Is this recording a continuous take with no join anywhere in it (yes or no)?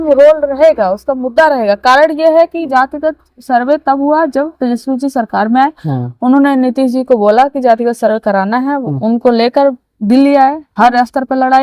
yes